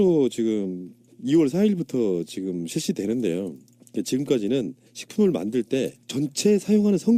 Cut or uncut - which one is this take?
uncut